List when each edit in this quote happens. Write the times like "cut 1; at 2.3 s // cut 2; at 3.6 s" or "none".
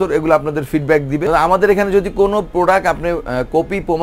cut 1; at 1.2 s // cut 2; at 2.5 s